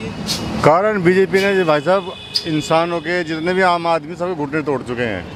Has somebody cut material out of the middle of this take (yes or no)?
no